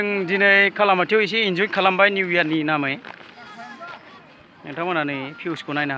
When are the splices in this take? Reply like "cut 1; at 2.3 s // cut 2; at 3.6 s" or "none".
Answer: none